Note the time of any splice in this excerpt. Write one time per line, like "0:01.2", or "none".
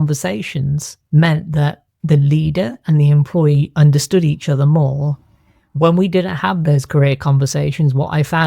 0:00.9
0:01.9